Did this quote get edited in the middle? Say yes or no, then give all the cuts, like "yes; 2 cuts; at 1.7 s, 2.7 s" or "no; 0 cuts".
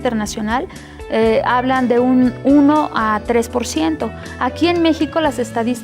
yes; 1 cut; at 3.9 s